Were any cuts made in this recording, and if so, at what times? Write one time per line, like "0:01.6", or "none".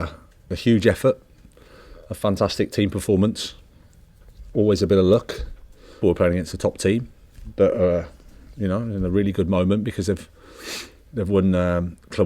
0:06.0